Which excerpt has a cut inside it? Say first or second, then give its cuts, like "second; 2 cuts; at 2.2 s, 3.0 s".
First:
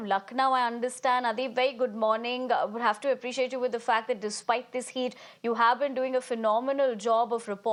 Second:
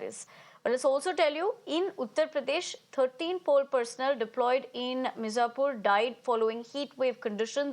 second; 1 cut; at 2.8 s